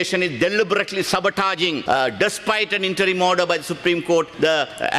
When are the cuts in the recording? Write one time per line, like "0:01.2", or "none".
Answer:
0:01.8